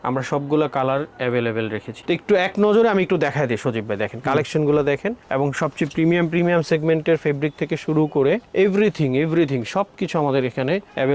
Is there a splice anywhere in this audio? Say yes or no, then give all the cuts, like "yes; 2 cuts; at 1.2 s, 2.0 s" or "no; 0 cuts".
yes; 1 cut; at 1.9 s